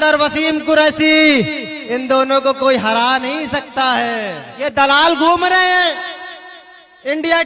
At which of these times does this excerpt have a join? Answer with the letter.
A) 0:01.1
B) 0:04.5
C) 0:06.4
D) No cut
B